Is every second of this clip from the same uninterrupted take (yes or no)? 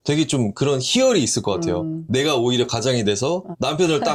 yes